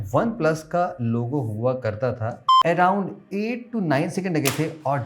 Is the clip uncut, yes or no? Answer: no